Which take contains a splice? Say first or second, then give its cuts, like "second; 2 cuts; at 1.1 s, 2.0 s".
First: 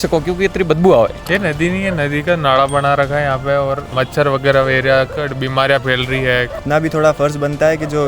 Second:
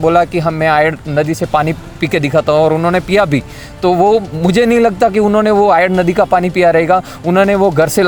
first; 3 cuts; at 1.2 s, 3.9 s, 6.6 s